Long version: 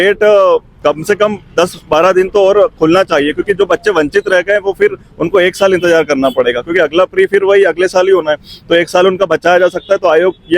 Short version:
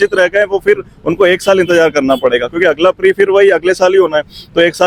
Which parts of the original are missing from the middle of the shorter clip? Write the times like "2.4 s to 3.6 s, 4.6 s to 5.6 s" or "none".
none